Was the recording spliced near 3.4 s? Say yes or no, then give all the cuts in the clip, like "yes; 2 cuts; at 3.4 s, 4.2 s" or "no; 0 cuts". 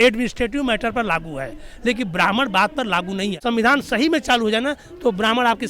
yes; 1 cut; at 3.4 s